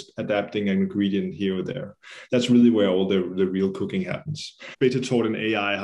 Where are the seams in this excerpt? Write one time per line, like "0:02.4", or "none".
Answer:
0:04.7